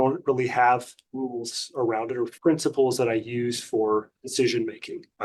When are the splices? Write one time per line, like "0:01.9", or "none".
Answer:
none